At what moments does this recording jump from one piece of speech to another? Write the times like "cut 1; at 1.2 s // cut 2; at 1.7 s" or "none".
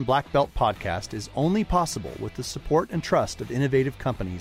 none